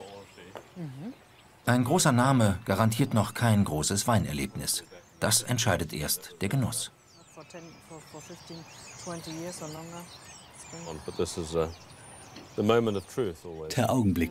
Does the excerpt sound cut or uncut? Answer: uncut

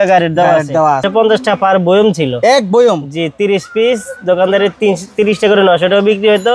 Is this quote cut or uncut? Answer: cut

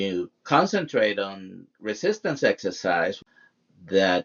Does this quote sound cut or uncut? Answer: cut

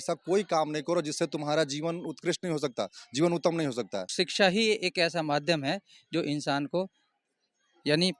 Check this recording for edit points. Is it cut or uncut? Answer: cut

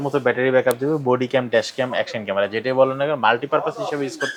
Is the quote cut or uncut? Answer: uncut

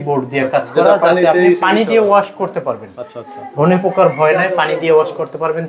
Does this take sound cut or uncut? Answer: uncut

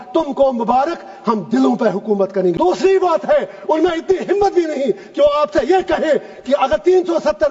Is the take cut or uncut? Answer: cut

